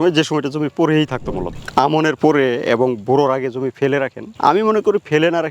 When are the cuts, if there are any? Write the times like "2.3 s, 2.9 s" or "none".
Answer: 1.6 s